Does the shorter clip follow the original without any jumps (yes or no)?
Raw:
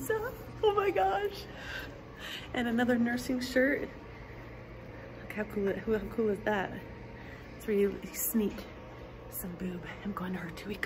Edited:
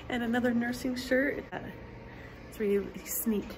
no